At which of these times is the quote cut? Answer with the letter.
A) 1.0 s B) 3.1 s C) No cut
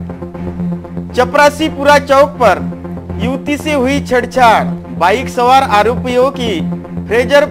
A